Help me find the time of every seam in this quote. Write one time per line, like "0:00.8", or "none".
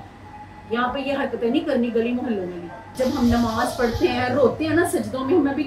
0:02.9